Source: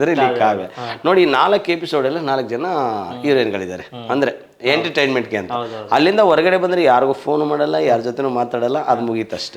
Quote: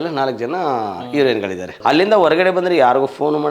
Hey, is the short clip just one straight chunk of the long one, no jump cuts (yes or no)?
no